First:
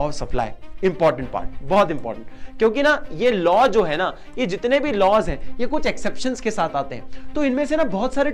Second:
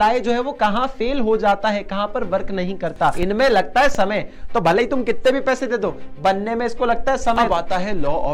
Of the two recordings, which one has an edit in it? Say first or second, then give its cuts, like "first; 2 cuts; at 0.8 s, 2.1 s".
second; 2 cuts; at 3.2 s, 7.4 s